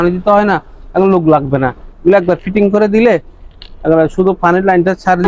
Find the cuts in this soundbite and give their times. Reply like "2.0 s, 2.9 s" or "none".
none